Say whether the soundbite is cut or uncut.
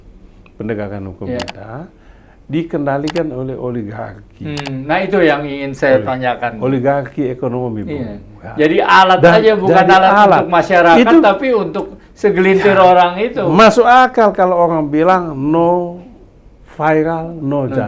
uncut